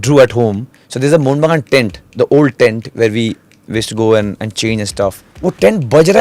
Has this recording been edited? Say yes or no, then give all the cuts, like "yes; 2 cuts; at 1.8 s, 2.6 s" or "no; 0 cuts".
yes; 1 cut; at 5.3 s